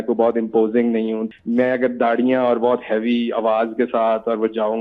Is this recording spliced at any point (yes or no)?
yes